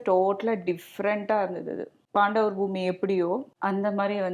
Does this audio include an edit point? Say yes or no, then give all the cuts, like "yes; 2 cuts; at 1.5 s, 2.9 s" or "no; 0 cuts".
no; 0 cuts